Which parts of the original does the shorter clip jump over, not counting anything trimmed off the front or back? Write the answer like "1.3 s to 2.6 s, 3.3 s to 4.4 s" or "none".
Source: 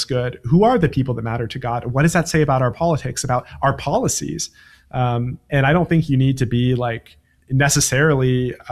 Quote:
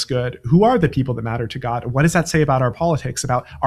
none